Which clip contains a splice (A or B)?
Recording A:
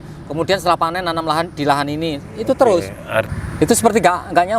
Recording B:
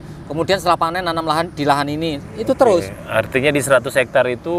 A